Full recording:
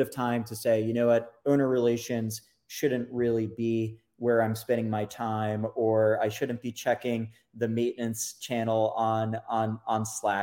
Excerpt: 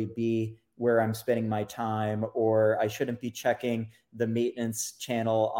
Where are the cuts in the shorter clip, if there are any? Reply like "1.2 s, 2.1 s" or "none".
none